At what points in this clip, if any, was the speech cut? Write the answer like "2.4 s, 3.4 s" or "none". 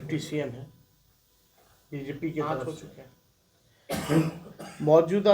2.7 s